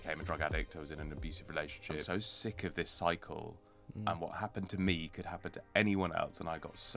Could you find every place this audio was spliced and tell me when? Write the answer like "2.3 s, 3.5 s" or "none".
2.1 s